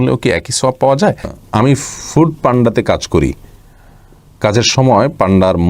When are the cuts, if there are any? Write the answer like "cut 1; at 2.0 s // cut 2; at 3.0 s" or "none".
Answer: cut 1; at 1.3 s